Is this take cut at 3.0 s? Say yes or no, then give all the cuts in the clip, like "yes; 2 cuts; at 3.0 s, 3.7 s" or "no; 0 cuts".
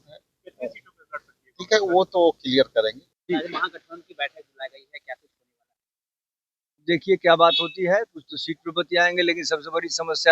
yes; 1 cut; at 3.0 s